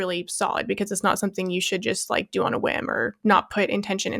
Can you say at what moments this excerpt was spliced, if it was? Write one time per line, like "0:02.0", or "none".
0:03.2